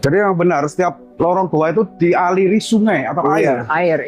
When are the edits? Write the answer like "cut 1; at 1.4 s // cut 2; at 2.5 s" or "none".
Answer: cut 1; at 1.0 s